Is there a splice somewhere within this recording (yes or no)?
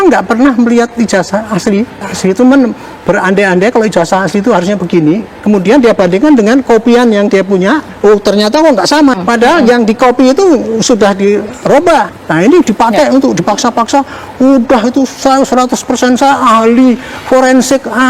yes